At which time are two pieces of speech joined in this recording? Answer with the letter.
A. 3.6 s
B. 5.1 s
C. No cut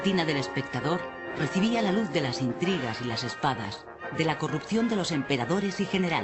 A